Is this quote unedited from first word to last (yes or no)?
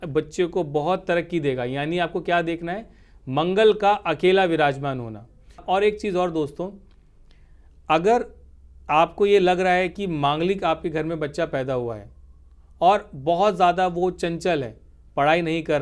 no